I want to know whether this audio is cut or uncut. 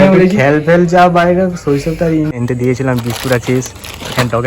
cut